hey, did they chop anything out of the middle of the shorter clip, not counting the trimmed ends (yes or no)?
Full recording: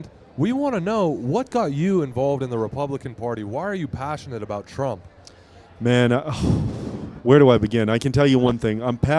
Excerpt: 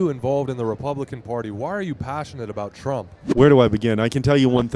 yes